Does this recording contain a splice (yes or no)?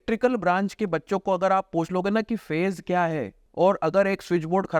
yes